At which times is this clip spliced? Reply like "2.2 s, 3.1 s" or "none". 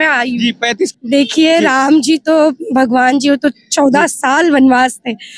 0.9 s